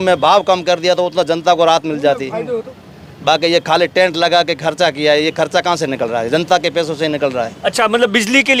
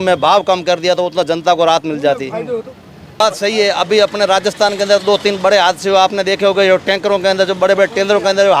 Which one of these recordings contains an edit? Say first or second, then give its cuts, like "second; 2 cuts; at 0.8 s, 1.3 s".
second; 1 cut; at 3.2 s